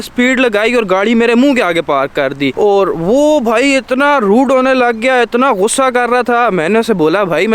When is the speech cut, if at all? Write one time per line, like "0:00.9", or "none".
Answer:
none